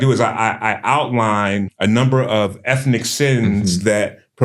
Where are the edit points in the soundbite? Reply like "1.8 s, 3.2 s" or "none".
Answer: 1.7 s

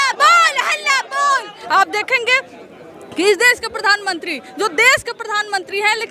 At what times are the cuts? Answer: 1.6 s

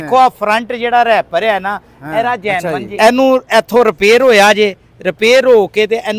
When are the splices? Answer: 2.6 s

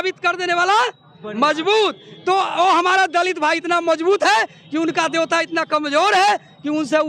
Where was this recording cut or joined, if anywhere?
none

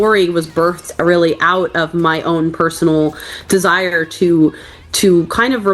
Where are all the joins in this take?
none

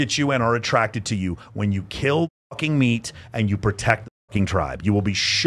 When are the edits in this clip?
none

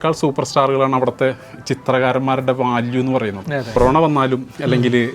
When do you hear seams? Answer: 3.8 s

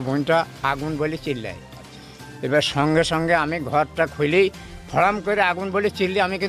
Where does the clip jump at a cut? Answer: none

